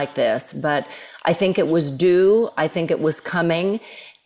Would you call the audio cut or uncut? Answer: uncut